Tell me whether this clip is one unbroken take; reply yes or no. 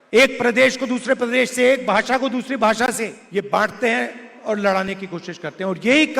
no